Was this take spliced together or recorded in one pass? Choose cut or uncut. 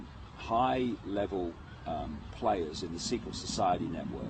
cut